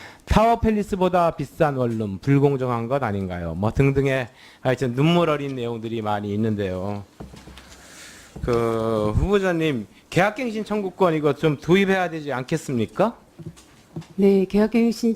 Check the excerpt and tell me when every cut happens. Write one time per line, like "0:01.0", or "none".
0:08.4